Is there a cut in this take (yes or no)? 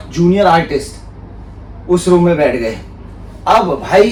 no